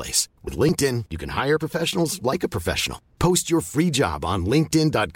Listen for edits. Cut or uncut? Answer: uncut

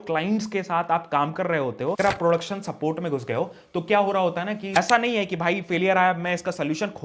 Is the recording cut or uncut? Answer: cut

